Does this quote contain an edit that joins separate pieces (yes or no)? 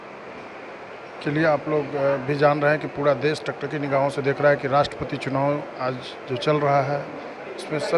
no